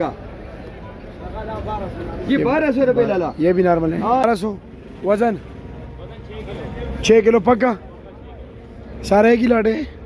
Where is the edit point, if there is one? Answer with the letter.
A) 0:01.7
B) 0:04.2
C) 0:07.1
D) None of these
B